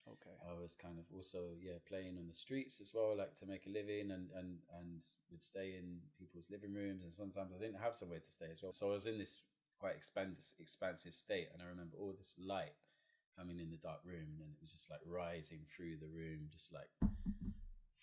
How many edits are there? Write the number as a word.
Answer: one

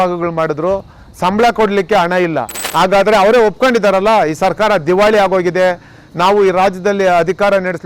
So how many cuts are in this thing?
one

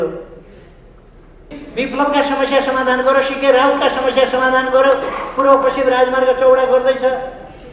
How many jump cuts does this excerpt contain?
one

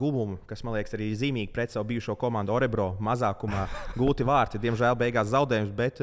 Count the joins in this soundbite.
zero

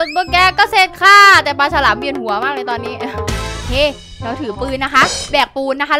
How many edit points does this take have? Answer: one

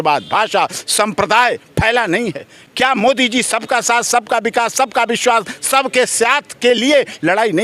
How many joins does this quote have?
zero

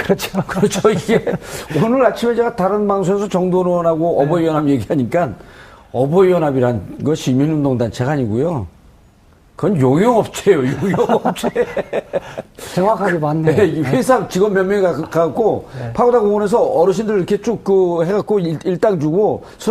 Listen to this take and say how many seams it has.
one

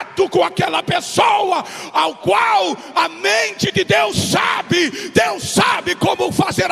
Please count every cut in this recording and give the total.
zero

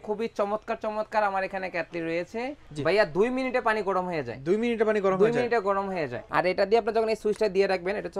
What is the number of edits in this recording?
two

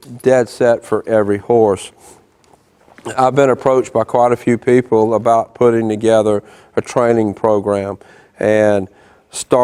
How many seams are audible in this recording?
zero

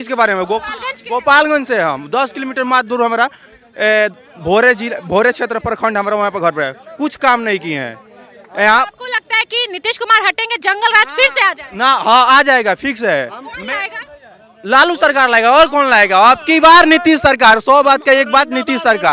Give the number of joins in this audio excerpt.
zero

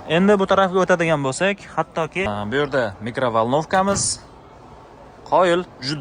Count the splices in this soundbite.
one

